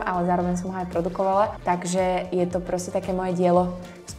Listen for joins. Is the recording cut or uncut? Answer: cut